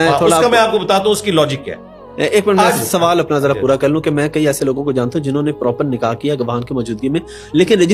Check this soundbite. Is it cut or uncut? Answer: uncut